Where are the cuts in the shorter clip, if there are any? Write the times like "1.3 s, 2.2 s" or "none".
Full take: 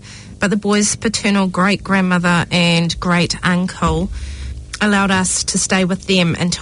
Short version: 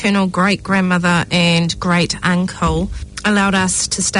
3.0 s